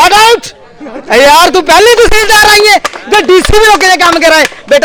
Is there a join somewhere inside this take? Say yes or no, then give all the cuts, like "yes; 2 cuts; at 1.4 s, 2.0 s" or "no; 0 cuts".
no; 0 cuts